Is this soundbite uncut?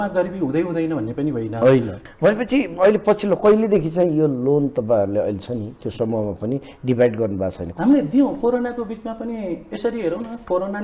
no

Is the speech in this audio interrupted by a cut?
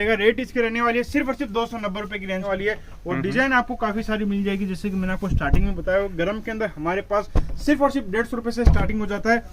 yes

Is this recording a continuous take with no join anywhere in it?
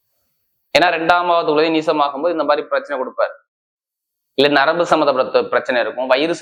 yes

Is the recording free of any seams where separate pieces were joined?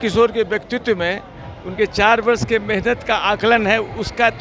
yes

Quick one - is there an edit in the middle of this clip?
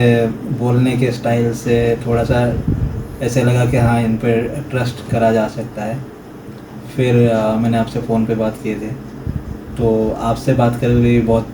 no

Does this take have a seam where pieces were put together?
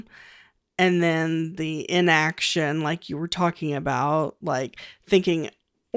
no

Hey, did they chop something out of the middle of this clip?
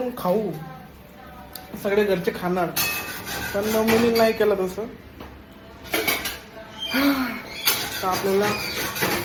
no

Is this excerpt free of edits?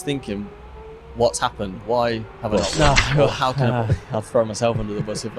no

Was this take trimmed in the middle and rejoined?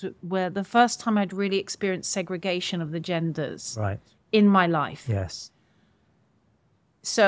no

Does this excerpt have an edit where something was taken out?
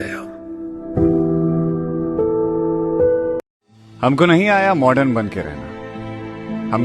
yes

